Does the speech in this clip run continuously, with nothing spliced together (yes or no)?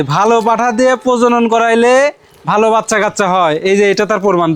yes